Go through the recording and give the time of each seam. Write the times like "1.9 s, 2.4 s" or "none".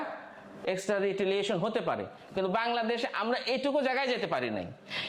none